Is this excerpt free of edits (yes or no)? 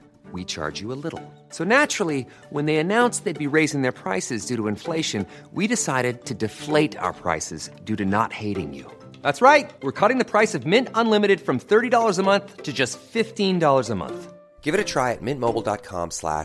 yes